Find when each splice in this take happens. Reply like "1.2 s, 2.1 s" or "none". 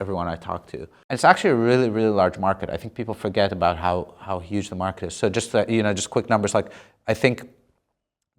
0.9 s